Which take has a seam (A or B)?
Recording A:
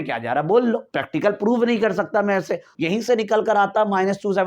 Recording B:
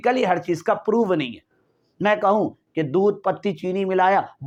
A